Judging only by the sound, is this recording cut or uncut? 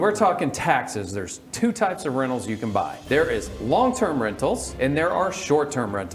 cut